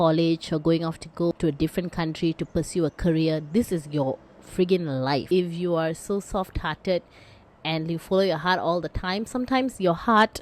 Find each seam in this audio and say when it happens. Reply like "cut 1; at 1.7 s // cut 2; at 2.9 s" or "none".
cut 1; at 1.3 s // cut 2; at 5.2 s